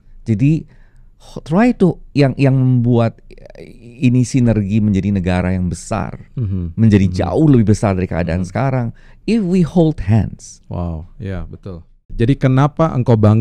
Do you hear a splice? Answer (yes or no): yes